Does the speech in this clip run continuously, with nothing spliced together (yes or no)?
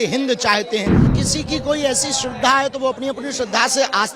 no